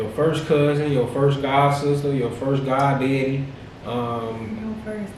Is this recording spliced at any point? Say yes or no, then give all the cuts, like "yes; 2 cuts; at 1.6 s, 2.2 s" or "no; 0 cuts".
no; 0 cuts